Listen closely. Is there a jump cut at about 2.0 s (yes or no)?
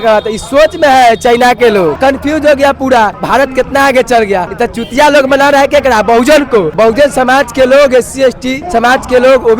yes